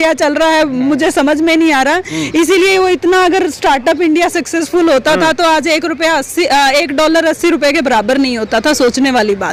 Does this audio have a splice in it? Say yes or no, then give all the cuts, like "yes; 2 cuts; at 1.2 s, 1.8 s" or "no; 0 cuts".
no; 0 cuts